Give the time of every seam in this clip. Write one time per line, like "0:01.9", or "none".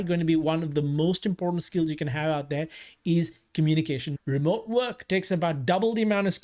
0:04.1